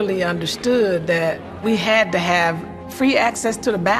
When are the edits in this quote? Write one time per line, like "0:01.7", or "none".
0:01.6